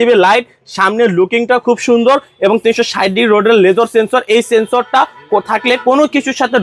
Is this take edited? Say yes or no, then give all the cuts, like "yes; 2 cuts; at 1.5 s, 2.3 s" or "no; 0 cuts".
no; 0 cuts